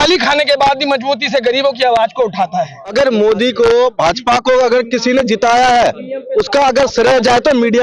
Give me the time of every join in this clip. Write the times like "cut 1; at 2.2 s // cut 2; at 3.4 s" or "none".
cut 1; at 2.9 s